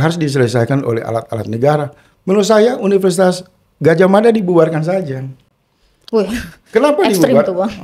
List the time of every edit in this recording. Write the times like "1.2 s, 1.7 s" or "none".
none

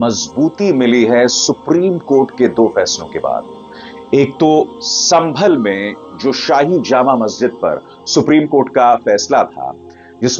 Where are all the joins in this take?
none

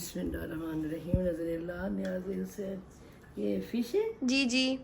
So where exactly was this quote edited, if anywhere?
none

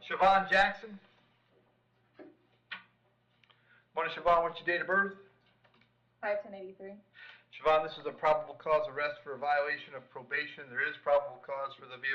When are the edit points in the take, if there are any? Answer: none

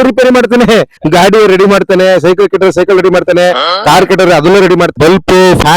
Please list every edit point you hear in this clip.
1.0 s, 4.9 s

